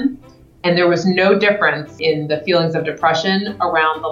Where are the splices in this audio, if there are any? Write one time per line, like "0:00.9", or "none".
0:01.9